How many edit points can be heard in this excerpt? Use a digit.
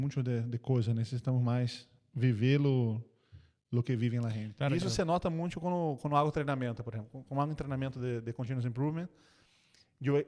1